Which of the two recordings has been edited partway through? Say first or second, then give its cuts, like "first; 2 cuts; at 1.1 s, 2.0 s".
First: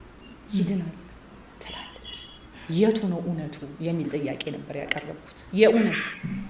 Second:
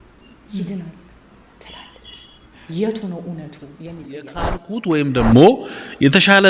second; 1 cut; at 4.7 s